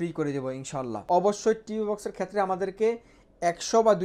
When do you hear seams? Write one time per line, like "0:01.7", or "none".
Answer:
0:01.0